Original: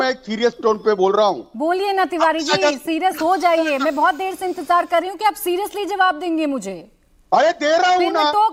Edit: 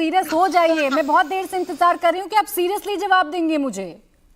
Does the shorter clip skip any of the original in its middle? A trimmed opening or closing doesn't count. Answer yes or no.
no